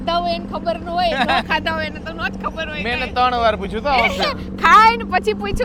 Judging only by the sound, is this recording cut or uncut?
uncut